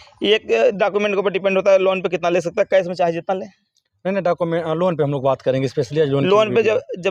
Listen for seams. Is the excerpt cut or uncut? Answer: uncut